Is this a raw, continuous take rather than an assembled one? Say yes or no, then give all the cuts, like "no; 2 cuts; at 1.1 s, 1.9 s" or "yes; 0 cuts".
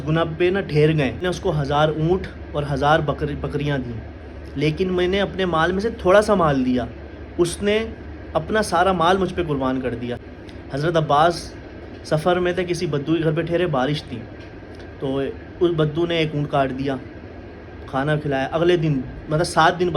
no; 2 cuts; at 1.2 s, 10.2 s